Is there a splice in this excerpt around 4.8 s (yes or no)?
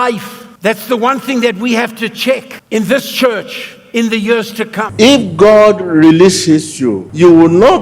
yes